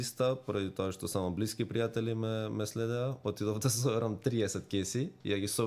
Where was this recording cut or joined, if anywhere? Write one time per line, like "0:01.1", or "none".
none